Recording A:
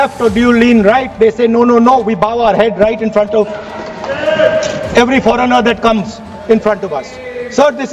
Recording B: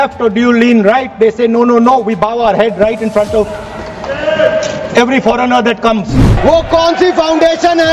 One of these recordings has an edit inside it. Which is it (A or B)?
B